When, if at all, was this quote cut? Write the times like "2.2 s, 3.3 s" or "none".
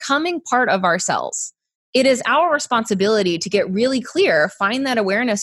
1.8 s

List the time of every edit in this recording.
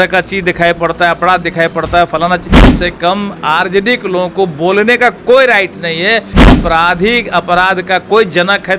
2.7 s, 6.5 s

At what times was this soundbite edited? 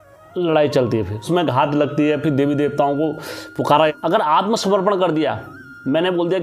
1.2 s, 3.9 s

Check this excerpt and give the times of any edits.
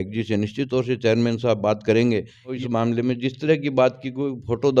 2.6 s

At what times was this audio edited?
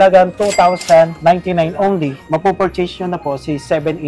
1.1 s, 2.2 s

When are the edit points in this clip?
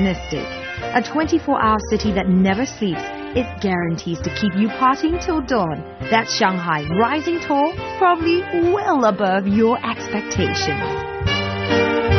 10.0 s

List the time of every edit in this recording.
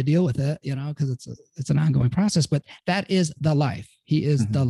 none

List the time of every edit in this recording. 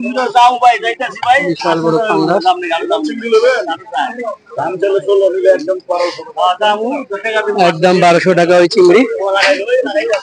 none

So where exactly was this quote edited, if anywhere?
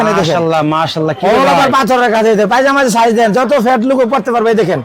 none

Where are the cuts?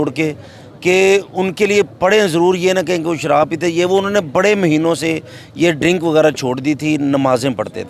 none

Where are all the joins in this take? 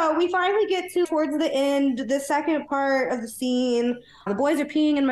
1.1 s, 4.2 s

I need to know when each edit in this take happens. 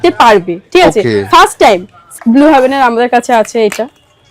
2.0 s

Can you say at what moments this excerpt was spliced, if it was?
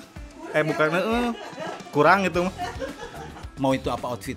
3.4 s

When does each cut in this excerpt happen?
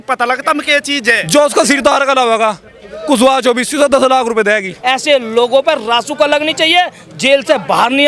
1.2 s, 4.7 s

